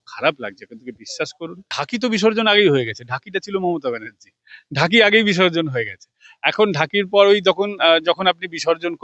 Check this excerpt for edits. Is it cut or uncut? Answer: cut